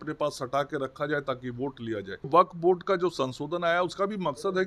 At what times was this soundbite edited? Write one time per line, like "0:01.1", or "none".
0:02.1